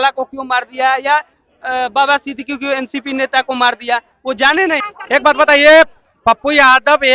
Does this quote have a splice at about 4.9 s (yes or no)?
yes